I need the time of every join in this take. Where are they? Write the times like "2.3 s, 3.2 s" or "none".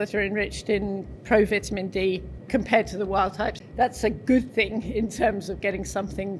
2.3 s, 3.6 s